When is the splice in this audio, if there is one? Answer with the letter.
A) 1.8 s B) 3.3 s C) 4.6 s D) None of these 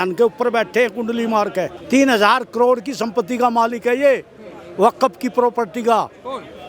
A